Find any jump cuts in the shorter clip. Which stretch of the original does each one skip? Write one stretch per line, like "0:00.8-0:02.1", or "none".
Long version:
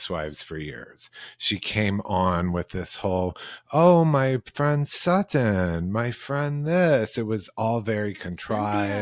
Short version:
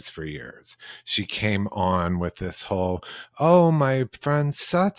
none